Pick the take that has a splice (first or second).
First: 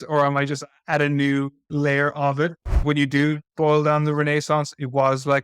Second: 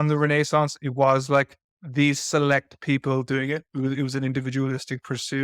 first